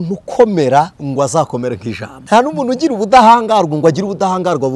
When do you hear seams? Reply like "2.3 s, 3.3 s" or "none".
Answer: 1.0 s, 2.2 s